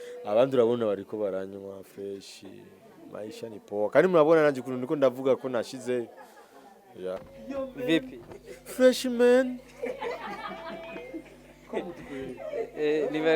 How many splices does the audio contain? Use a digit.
1